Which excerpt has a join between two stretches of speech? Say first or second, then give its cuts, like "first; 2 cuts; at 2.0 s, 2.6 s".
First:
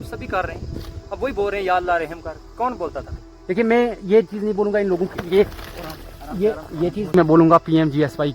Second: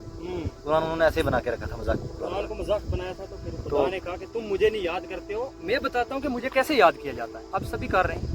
first; 2 cuts; at 3.1 s, 7.1 s